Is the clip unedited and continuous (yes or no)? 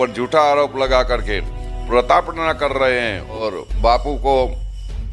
no